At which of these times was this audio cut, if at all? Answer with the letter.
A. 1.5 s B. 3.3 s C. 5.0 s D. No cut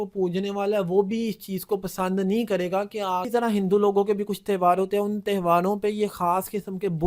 B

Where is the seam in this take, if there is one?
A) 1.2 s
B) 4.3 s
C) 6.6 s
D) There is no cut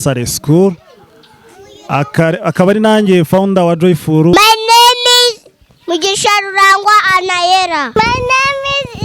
B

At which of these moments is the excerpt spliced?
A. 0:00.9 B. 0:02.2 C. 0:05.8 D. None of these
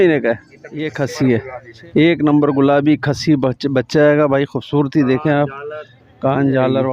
A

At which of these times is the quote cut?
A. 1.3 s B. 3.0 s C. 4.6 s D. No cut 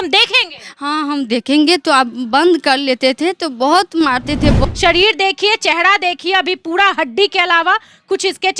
C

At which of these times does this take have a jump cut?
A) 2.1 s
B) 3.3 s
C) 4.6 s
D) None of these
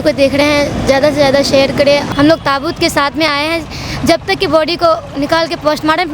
A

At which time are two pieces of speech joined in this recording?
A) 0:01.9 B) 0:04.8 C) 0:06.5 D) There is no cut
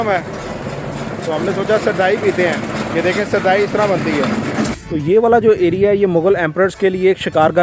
B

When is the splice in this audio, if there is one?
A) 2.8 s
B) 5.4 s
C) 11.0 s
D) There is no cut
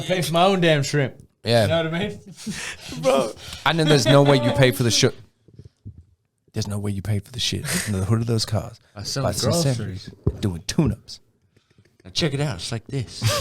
D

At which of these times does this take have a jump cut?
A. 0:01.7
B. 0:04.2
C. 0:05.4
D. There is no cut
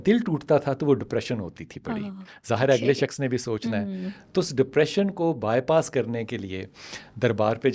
D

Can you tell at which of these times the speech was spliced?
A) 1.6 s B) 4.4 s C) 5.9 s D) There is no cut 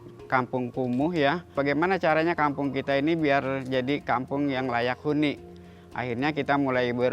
A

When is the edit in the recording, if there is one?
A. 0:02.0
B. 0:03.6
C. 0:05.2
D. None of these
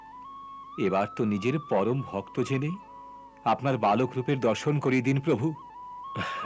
D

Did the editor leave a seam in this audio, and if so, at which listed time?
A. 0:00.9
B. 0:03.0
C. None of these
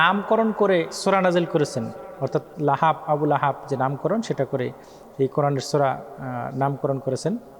A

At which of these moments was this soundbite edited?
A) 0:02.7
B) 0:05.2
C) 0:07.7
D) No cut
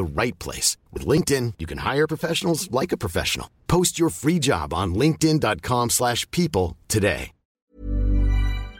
C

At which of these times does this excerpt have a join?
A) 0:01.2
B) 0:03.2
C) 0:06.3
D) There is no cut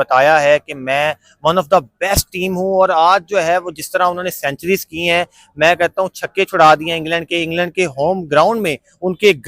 D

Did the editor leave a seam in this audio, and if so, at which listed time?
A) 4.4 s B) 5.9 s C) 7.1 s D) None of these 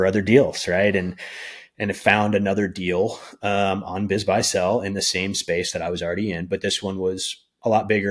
D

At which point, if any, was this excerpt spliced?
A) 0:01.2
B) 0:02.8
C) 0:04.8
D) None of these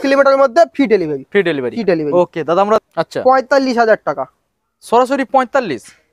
B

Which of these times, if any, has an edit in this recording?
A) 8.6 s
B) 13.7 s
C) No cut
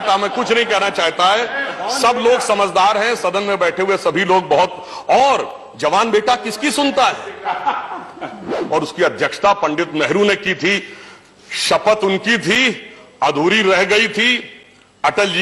A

